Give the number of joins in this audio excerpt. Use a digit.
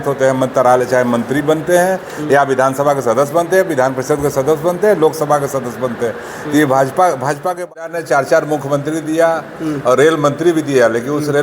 1